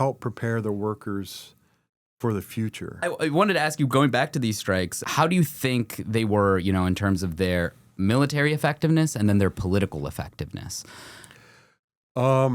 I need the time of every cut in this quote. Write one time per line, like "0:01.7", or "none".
0:03.0
0:05.0